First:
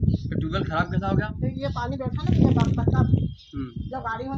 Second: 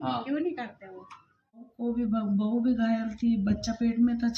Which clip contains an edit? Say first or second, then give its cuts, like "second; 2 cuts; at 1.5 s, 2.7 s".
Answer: second; 1 cut; at 1.7 s